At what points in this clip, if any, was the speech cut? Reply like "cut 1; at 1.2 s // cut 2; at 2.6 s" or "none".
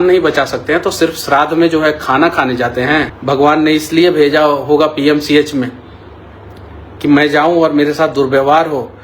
cut 1; at 3.1 s